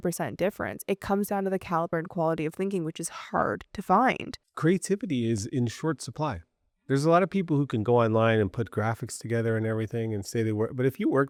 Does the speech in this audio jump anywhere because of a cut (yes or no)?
no